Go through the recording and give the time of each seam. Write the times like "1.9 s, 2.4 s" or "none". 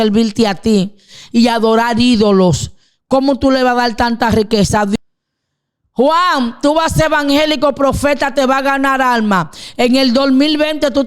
4.9 s